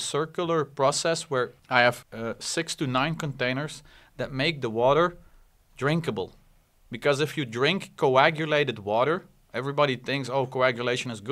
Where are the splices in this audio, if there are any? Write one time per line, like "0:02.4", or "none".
0:01.6
0:02.1